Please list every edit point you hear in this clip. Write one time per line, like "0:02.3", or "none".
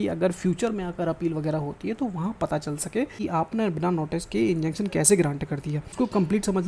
0:03.1
0:05.8